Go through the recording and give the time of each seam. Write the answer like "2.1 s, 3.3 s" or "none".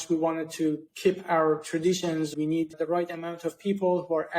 0.9 s, 2.3 s